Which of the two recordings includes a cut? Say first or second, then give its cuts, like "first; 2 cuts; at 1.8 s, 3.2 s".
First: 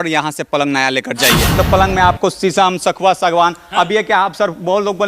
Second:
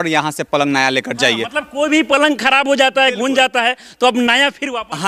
first; 1 cut; at 1.5 s